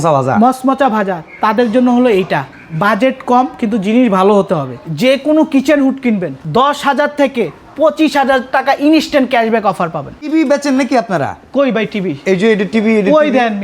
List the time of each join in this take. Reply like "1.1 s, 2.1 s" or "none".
4.8 s, 6.4 s, 10.3 s